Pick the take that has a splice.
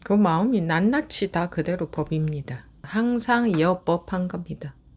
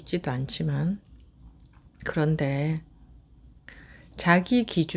first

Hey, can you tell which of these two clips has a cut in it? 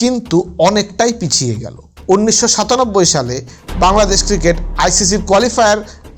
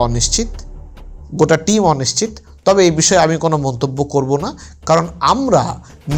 first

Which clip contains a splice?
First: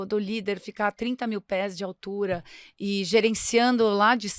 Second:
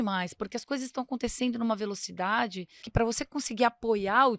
second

